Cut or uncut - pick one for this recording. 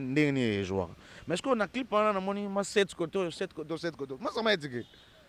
uncut